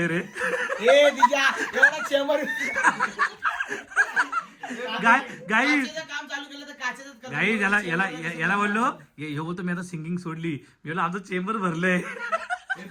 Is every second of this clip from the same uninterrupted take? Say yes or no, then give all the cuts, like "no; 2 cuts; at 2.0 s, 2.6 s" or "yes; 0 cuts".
yes; 0 cuts